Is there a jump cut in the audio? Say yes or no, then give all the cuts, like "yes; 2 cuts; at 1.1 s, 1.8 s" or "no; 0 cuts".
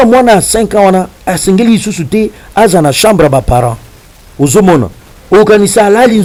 no; 0 cuts